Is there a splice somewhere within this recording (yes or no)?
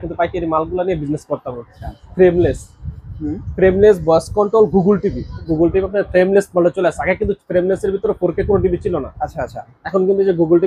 yes